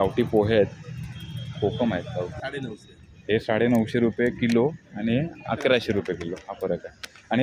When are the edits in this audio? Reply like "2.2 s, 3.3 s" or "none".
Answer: 2.4 s